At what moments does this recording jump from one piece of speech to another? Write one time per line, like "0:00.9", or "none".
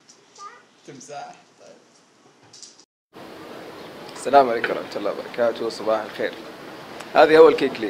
0:02.8